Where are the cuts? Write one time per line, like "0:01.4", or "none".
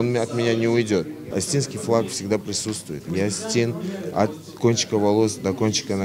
0:01.2